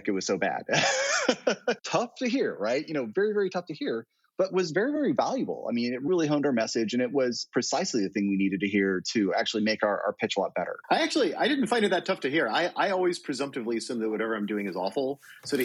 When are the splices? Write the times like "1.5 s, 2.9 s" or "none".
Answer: 1.8 s, 10.8 s